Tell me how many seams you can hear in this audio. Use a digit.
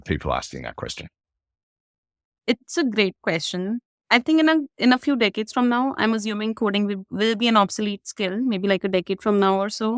2